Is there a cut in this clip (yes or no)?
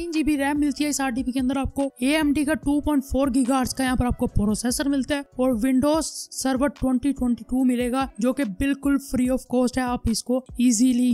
no